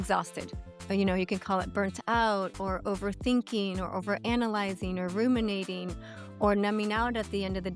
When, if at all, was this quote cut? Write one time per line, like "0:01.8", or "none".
none